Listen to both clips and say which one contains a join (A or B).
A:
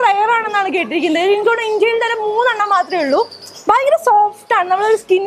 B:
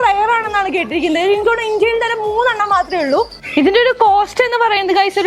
B